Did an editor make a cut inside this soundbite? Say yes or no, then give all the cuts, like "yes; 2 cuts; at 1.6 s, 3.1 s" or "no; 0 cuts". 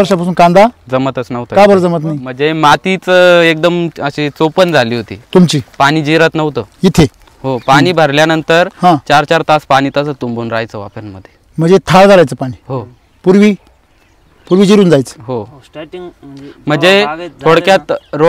yes; 1 cut; at 2.3 s